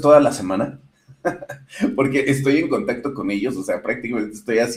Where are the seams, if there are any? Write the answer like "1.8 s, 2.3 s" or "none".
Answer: none